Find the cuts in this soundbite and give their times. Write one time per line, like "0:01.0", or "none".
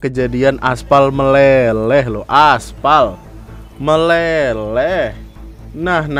none